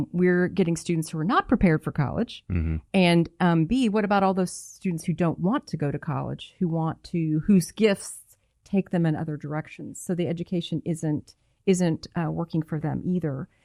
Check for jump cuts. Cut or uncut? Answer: uncut